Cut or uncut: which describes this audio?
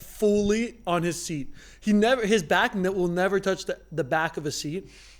uncut